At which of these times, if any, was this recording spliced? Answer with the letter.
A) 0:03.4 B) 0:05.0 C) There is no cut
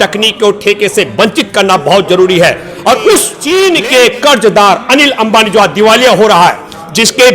A